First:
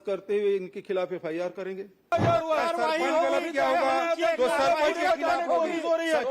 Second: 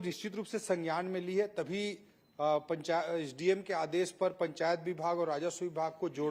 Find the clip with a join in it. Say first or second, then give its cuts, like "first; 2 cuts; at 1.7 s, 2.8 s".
first; 1 cut; at 2.1 s